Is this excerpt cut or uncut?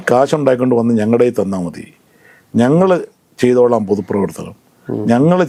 uncut